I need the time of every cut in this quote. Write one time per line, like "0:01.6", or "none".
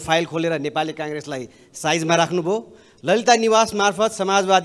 none